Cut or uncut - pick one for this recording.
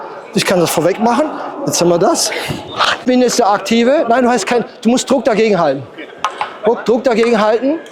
cut